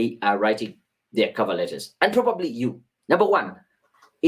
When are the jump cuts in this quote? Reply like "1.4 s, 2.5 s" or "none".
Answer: 2.9 s